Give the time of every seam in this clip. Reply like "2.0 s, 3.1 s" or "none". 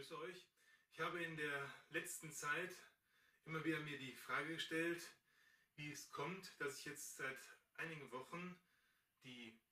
none